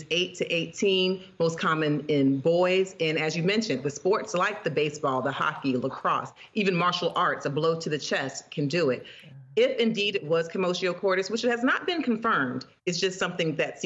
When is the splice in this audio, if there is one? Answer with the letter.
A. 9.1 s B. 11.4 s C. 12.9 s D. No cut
D